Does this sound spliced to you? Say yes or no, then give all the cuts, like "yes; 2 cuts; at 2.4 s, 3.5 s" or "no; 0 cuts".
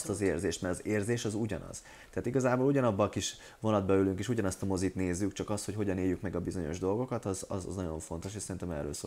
no; 0 cuts